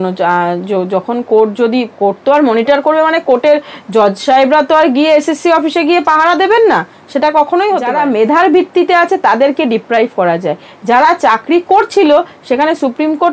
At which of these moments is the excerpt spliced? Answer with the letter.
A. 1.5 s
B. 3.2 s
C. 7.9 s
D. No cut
C